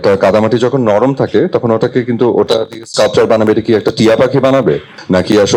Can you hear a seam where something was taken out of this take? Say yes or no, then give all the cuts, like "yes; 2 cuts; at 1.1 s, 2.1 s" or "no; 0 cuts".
no; 0 cuts